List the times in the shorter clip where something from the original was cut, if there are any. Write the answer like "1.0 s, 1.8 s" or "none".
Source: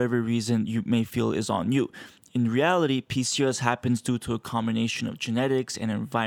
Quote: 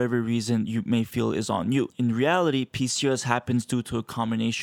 1.9 s